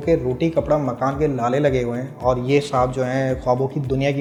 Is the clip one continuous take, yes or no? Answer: yes